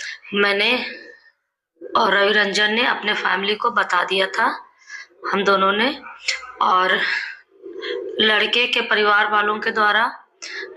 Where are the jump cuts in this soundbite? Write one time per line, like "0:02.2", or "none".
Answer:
none